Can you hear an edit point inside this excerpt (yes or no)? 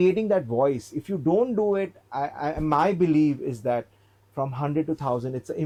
no